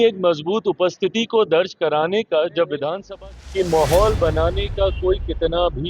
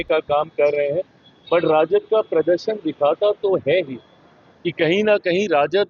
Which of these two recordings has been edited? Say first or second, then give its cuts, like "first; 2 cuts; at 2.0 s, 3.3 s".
first; 1 cut; at 3.0 s